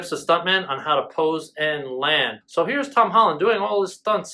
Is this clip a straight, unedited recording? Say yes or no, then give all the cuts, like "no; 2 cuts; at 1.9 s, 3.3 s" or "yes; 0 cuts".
no; 1 cut; at 2.4 s